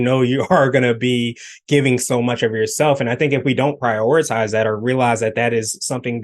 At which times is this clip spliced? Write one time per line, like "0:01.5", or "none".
none